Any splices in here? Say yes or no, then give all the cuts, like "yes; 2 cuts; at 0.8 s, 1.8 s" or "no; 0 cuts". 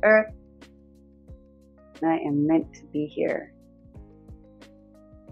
yes; 1 cut; at 4.0 s